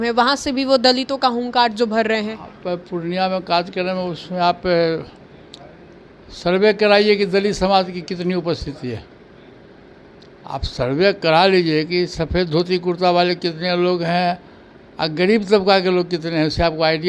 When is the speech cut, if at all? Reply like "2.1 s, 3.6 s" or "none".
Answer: none